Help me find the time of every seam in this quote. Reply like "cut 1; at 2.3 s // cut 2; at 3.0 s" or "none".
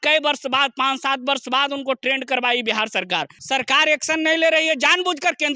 cut 1; at 3.3 s